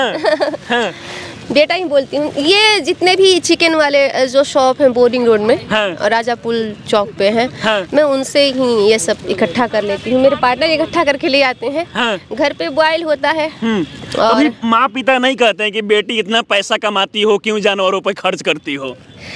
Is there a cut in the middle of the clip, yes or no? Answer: no